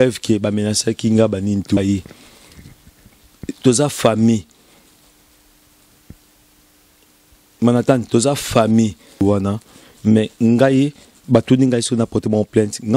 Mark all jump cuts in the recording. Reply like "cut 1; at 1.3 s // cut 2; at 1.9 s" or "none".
cut 1; at 1.8 s // cut 2; at 9.2 s